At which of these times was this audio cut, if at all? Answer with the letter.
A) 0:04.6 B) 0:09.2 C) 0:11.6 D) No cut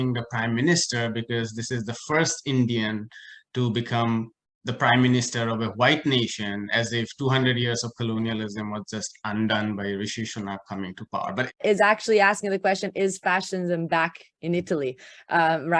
C